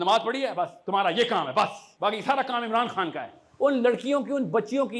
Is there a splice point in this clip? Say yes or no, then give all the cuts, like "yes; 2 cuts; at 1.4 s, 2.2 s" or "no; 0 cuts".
yes; 2 cuts; at 1.8 s, 3.4 s